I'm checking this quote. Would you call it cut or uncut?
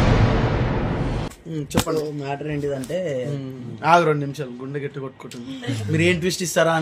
cut